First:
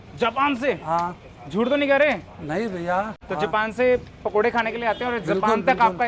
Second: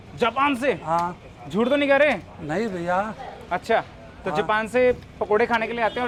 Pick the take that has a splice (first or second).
first